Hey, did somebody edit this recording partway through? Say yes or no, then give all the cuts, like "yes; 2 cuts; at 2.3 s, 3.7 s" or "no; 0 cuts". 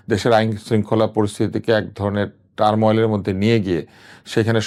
no; 0 cuts